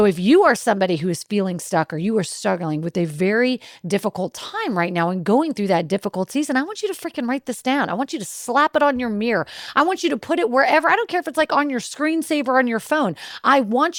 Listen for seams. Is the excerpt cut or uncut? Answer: uncut